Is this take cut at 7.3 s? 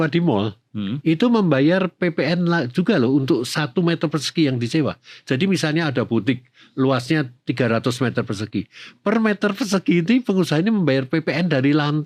no; 0 cuts

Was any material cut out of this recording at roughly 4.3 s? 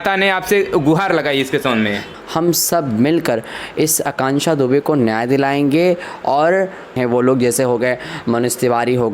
no; 2 cuts; at 2.1 s, 6.9 s

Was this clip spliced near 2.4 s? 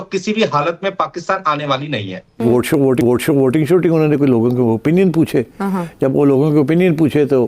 yes; 1 cut; at 2.4 s

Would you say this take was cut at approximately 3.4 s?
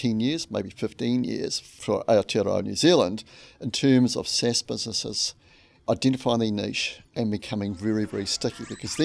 no; 0 cuts

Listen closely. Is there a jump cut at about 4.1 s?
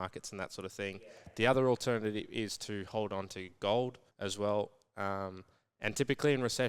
yes; 1 cut; at 4.1 s

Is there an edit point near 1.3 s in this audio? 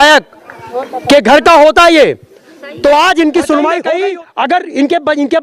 no; 1 cut; at 3.9 s

